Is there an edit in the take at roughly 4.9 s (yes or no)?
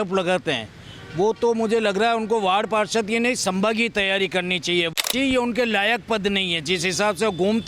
yes